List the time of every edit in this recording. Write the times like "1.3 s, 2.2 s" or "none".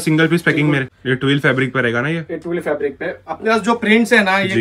0.9 s